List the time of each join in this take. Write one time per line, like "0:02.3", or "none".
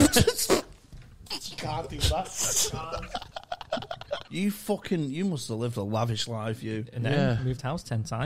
0:04.2

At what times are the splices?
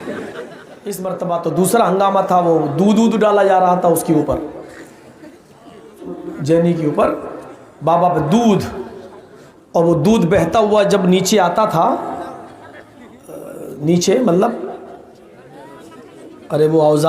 0:00.9
0:06.1

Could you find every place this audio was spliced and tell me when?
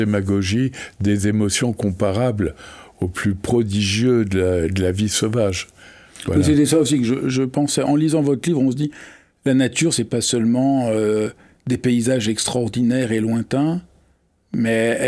none

